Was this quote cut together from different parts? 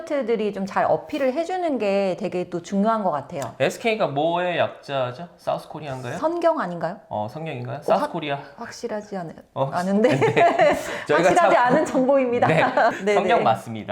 yes; 1 cut; at 13.0 s

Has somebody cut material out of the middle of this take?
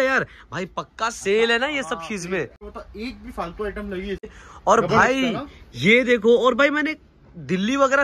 yes; 2 cuts; at 2.7 s, 4.5 s

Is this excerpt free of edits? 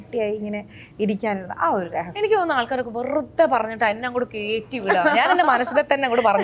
yes; 0 cuts

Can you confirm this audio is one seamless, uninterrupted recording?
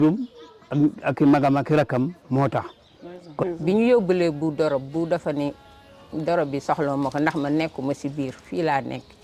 no; 1 cut; at 3.4 s

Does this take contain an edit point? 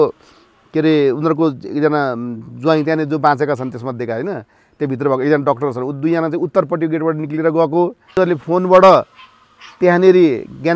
yes; 1 cut; at 8.0 s

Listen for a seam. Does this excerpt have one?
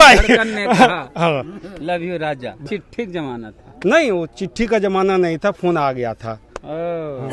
yes; 1 cut; at 2.6 s

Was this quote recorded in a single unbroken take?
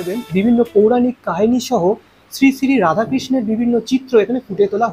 yes; 0 cuts

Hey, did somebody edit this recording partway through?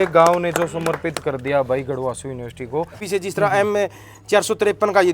yes; 1 cut; at 3.0 s

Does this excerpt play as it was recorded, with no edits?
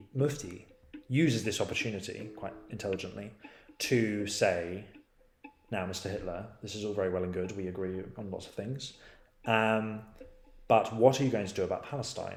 yes; 0 cuts

